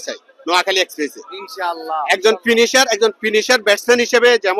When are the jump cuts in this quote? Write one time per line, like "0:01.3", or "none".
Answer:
none